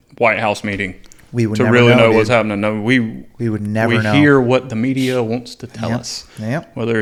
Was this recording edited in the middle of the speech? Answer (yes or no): no